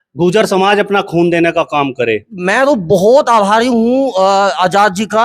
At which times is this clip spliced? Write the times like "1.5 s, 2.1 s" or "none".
2.4 s